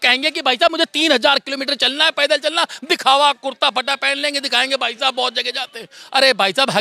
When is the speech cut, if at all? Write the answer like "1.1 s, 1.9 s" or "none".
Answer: none